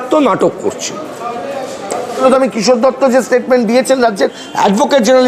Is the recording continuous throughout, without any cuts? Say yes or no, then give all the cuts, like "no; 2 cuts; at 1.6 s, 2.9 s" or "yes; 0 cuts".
no; 1 cut; at 2.2 s